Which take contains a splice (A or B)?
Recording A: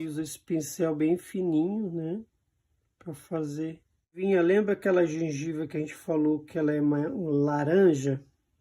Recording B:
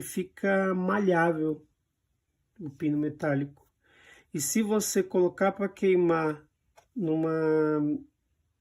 A